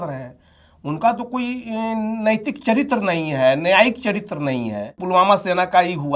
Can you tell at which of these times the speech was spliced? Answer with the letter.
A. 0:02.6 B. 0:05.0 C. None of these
B